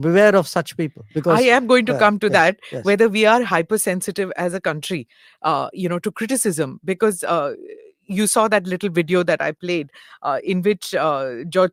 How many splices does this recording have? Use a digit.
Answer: 0